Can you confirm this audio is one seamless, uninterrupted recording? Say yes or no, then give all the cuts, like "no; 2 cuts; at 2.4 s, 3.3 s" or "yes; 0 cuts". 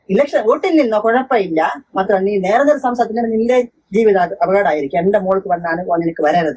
yes; 0 cuts